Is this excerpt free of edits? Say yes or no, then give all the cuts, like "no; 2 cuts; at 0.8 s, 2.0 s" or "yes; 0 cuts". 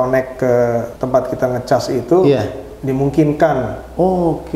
no; 1 cut; at 1.0 s